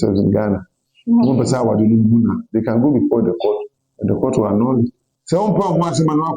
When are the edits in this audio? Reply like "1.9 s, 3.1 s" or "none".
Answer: 5.1 s